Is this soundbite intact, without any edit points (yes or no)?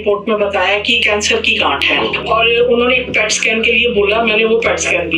no